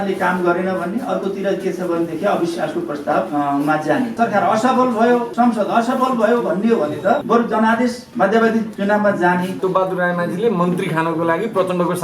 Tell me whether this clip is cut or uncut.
cut